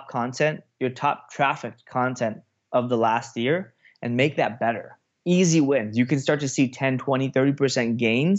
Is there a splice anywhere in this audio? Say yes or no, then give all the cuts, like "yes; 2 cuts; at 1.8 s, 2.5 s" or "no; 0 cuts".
no; 0 cuts